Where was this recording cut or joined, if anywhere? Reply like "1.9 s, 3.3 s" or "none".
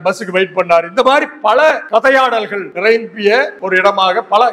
1.8 s, 2.7 s, 3.6 s